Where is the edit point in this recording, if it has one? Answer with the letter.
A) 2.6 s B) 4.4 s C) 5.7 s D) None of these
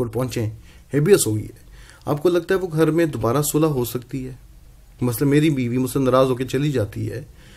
D